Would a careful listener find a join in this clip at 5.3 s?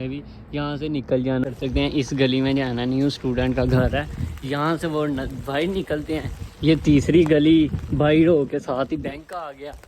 no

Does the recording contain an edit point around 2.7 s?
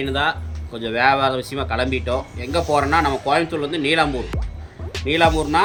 no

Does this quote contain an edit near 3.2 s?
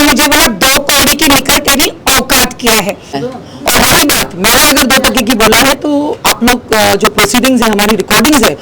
yes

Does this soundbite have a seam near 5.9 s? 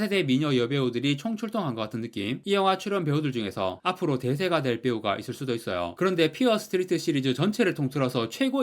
yes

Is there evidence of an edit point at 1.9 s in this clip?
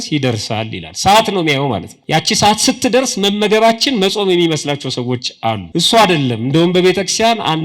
yes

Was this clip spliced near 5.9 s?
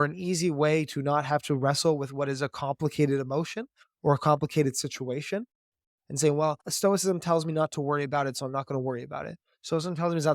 yes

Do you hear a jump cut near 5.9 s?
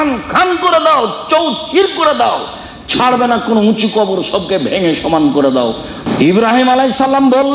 yes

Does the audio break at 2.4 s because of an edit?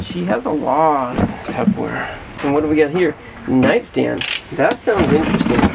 yes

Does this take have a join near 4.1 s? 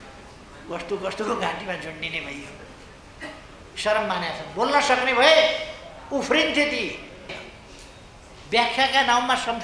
no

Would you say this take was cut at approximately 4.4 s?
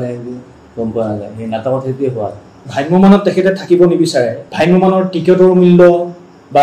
yes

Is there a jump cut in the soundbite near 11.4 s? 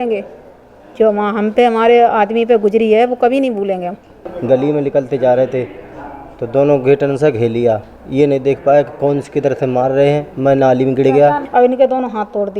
yes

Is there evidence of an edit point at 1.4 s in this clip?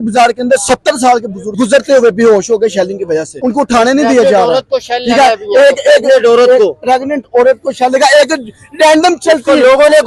yes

